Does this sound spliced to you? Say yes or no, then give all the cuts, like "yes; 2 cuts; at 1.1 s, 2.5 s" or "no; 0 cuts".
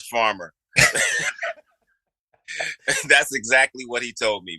no; 0 cuts